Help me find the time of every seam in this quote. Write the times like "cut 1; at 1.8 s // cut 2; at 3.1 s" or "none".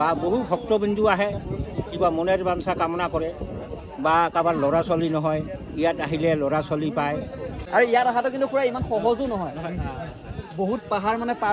cut 1; at 7.5 s